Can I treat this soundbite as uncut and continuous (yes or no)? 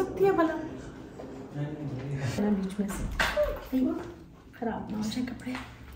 no